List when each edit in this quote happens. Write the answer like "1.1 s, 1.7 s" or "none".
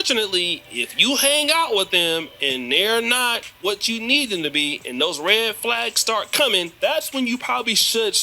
5.0 s